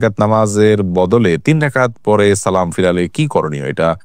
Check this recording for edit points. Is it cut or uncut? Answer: uncut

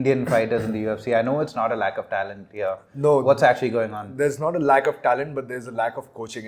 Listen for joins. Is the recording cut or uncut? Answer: uncut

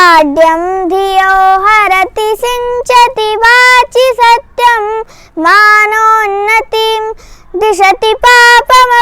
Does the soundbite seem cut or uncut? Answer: uncut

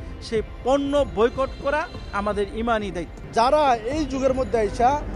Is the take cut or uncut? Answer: cut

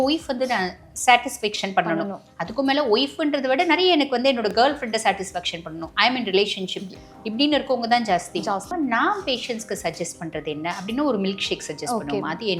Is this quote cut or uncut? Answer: cut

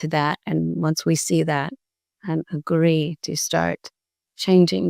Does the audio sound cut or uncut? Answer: uncut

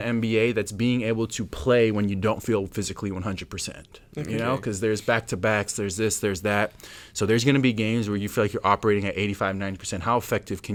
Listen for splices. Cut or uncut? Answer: uncut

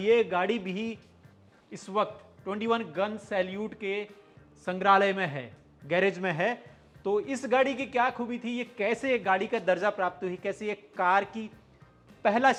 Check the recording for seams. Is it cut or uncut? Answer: uncut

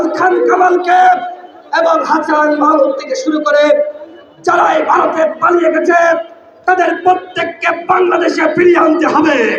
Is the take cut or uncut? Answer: uncut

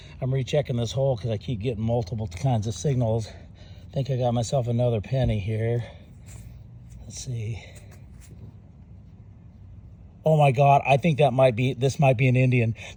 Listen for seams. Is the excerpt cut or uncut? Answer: uncut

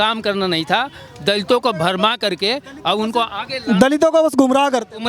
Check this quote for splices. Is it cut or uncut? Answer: uncut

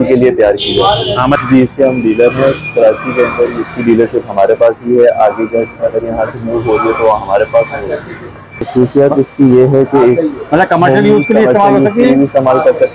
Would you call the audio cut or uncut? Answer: cut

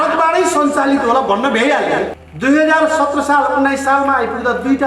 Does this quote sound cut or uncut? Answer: cut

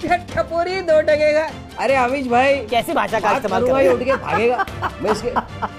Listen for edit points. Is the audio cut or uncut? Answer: uncut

